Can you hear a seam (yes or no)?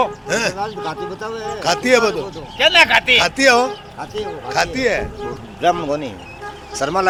no